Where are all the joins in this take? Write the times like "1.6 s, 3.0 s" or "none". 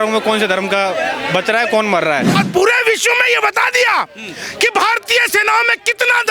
2.4 s